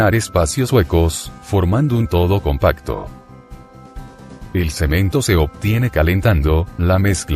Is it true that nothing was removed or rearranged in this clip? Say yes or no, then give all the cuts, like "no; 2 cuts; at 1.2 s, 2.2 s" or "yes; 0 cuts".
no; 1 cut; at 4.7 s